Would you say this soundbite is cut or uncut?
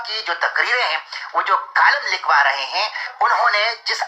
cut